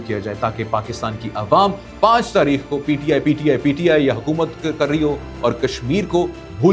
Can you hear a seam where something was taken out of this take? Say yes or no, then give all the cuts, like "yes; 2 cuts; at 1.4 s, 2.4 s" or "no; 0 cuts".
no; 0 cuts